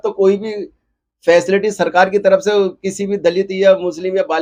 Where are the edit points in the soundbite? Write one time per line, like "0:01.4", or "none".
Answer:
none